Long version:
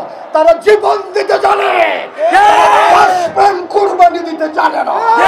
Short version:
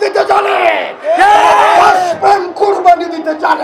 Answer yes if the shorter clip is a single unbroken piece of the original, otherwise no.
yes